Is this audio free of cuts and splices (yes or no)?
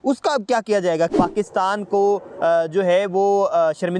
no